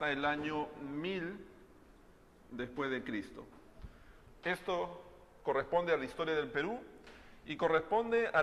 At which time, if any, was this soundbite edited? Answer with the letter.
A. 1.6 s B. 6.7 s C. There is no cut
B